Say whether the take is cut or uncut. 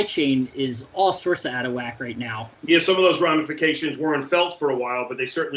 cut